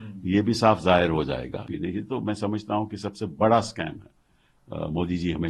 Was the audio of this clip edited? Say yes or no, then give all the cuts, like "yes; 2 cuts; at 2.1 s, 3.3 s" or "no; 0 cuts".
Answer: yes; 1 cut; at 1.7 s